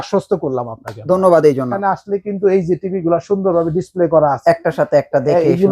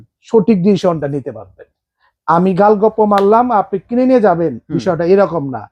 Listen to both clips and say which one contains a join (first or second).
first